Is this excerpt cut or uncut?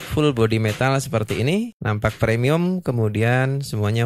uncut